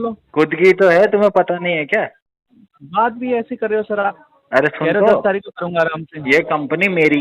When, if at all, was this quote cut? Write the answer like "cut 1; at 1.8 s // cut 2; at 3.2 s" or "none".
none